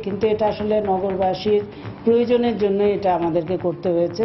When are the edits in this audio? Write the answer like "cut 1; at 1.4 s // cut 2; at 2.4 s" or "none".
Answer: none